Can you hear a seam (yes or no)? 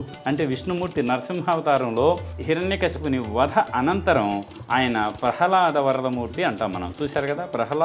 yes